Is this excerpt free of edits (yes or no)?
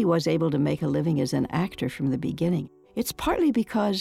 no